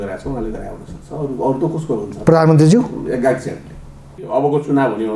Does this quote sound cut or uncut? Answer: cut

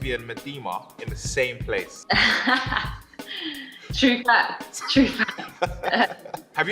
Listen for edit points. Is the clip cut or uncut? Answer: uncut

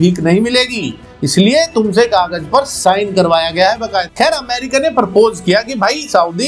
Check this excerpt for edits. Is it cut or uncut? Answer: cut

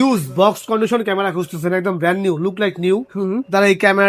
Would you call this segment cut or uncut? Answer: uncut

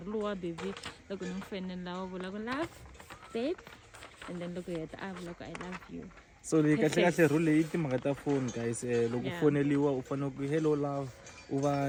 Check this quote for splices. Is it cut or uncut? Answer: uncut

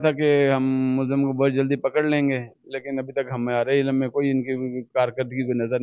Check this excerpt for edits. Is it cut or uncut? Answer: uncut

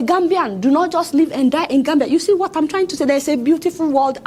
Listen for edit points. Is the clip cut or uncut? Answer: uncut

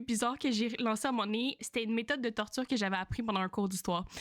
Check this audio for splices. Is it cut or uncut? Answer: cut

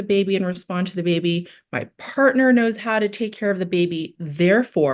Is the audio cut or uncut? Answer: uncut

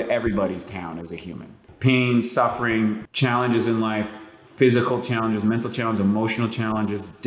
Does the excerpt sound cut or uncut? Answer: cut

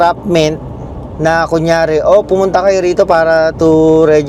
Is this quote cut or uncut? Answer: uncut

